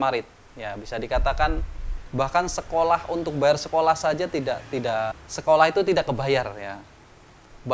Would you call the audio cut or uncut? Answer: uncut